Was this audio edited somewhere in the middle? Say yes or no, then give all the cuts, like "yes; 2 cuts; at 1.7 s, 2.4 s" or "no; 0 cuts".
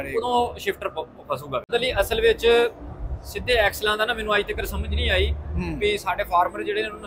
yes; 1 cut; at 1.7 s